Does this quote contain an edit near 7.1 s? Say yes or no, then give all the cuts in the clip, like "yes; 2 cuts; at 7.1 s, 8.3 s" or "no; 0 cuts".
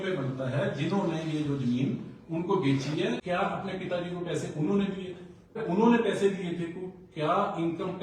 no; 2 cuts; at 3.2 s, 5.6 s